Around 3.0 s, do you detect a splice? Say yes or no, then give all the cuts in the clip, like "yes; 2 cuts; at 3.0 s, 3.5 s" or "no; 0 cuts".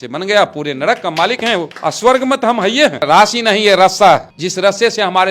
yes; 3 cuts; at 1.7 s, 3.0 s, 4.4 s